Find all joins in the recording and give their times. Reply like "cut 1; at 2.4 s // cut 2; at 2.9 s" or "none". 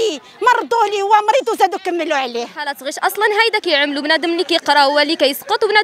cut 1; at 2.8 s